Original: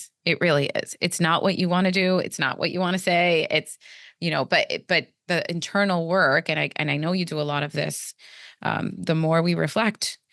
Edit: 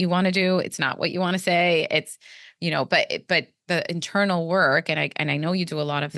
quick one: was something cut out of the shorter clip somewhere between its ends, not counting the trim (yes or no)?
no